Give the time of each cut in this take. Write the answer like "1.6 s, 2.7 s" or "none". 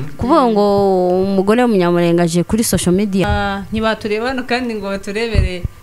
3.2 s